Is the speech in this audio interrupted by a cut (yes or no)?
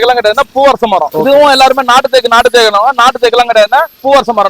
yes